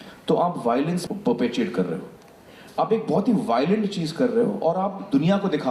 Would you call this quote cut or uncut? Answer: cut